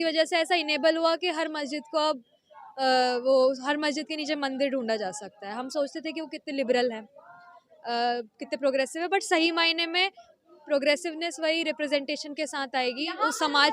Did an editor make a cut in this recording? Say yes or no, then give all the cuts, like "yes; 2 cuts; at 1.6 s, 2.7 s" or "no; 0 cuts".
no; 0 cuts